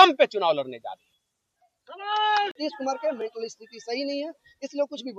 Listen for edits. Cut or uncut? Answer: cut